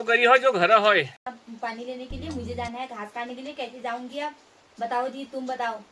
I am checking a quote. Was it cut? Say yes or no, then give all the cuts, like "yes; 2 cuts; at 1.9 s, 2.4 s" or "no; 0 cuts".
yes; 1 cut; at 1.2 s